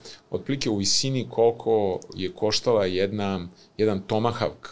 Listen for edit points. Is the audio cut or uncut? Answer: uncut